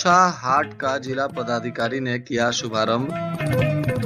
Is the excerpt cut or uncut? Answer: uncut